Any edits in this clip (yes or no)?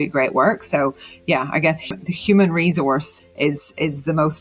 yes